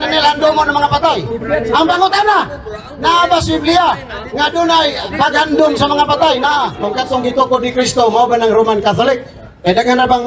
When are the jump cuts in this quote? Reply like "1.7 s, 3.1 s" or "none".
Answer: 6.8 s